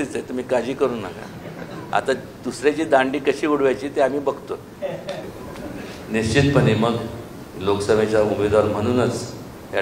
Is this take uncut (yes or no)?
no